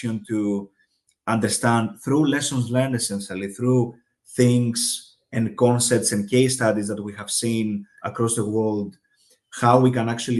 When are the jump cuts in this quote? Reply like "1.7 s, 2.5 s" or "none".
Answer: none